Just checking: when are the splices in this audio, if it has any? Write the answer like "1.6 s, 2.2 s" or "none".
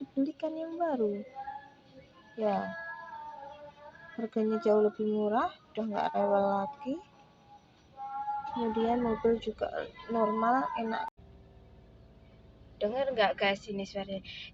11.1 s